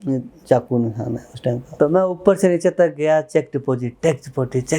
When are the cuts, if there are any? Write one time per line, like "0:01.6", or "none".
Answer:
0:01.7